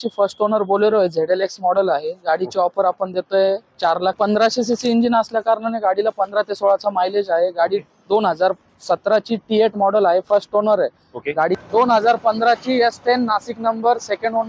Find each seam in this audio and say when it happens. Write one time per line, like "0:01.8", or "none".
0:04.2
0:11.6